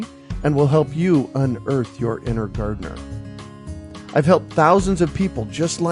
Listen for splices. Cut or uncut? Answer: cut